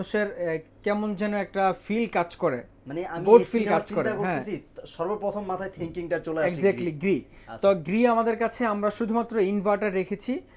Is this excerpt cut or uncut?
uncut